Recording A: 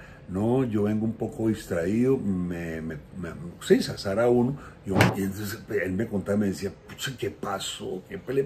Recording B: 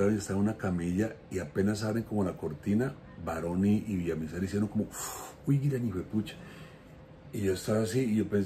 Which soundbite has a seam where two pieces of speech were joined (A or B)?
A